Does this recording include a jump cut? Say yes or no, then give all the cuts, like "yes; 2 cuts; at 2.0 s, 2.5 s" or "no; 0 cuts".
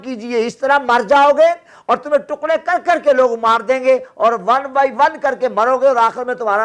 no; 0 cuts